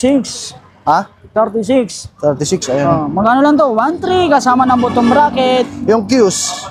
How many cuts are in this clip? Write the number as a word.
zero